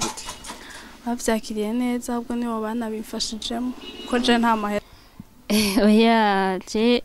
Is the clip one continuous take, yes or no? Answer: no